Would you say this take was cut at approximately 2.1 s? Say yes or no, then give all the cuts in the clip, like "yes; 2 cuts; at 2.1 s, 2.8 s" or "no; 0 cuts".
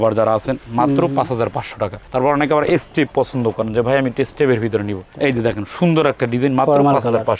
no; 0 cuts